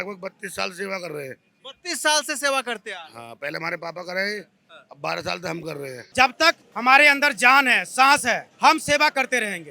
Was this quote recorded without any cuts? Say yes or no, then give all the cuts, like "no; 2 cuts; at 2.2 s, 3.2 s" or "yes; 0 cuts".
no; 2 cuts; at 6.0 s, 8.5 s